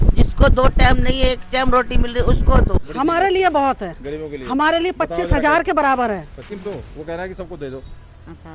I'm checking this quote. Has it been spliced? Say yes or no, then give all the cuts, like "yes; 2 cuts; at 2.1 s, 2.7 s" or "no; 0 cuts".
yes; 2 cuts; at 2.8 s, 6.5 s